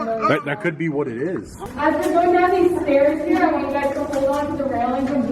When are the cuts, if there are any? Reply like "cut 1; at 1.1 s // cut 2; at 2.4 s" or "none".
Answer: cut 1; at 1.6 s